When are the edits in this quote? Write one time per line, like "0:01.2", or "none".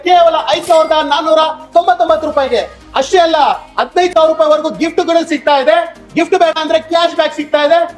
none